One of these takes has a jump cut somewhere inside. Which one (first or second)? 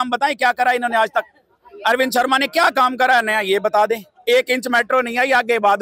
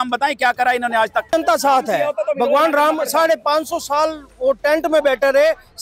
second